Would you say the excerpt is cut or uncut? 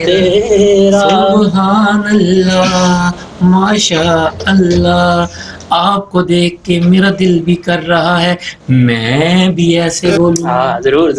uncut